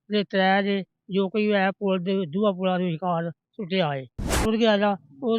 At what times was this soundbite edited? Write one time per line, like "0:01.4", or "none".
0:04.4